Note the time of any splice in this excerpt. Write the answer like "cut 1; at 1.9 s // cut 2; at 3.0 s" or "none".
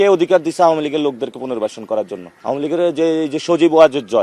cut 1; at 2.2 s